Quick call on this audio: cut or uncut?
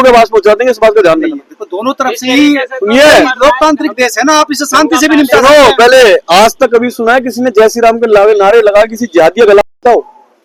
uncut